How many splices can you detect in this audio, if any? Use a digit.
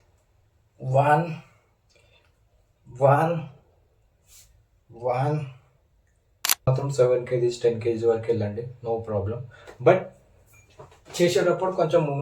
1